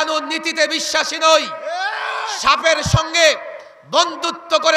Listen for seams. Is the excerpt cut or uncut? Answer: uncut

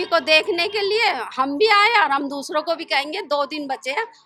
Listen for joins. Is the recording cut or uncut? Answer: uncut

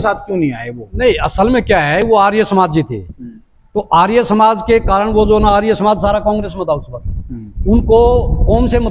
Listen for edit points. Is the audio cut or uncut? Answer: uncut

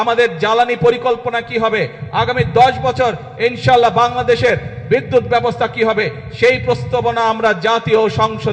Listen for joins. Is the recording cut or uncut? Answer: uncut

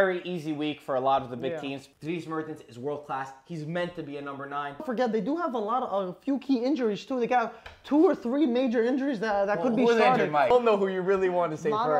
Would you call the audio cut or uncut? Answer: cut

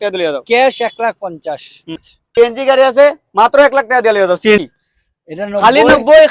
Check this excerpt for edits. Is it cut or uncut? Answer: cut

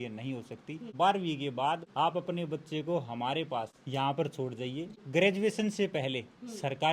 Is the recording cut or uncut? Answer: cut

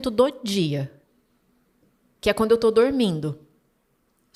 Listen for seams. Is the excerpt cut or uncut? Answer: uncut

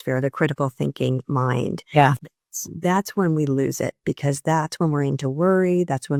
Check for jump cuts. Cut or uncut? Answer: uncut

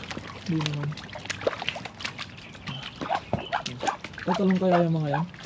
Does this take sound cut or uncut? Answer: uncut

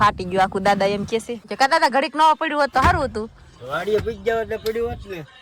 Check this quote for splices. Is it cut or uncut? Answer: uncut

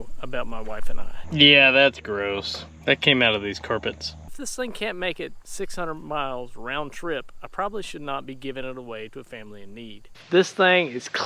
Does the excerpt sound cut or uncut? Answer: cut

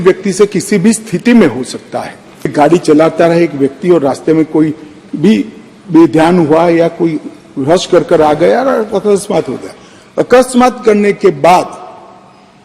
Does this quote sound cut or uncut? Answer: cut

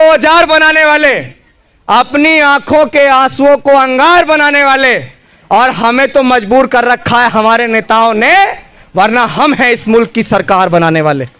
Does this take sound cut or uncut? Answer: uncut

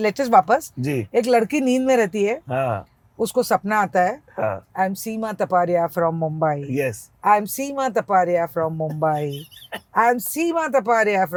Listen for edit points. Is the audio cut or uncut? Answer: uncut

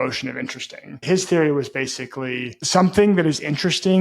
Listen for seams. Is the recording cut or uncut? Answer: cut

